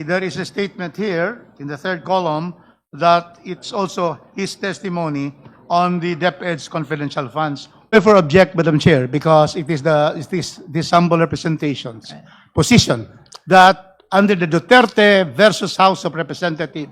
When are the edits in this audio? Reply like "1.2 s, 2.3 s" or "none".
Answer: 7.9 s